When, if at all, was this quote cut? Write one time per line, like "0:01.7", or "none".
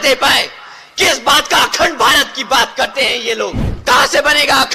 0:03.7